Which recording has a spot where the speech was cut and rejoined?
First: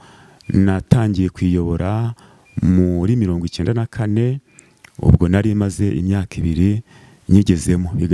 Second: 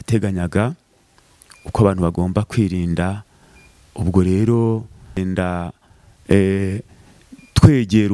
second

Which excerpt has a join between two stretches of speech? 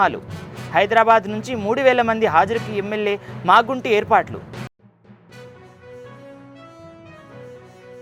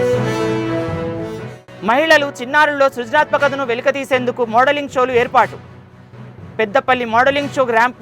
second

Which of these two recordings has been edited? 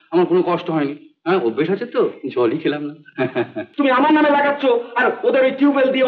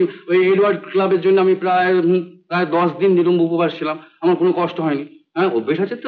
first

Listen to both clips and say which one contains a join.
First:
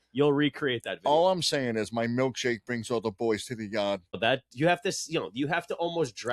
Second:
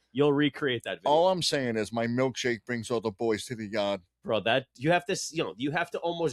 first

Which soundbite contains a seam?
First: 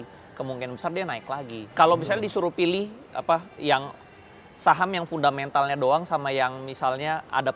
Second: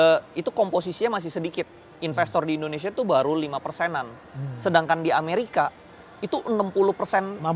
first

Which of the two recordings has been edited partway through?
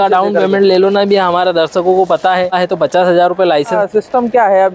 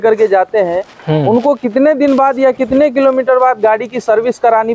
first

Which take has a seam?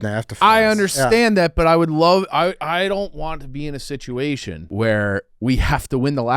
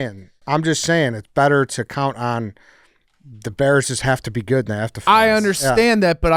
first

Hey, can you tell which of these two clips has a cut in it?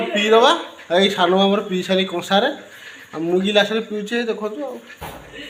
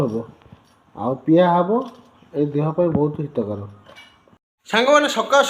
second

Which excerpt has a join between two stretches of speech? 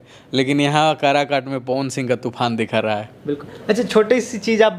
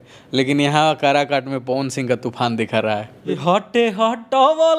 second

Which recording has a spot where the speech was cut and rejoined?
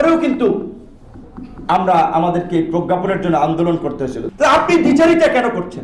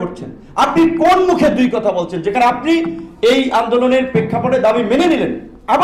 first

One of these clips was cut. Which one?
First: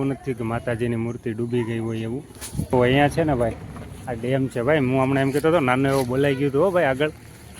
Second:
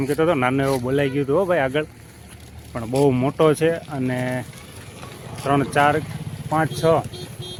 first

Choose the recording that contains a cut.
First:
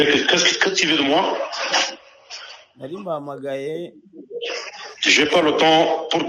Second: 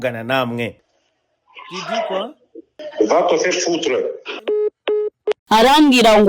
second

